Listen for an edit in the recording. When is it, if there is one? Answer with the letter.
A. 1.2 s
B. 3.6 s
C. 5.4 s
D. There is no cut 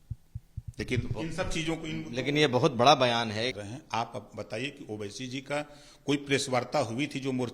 B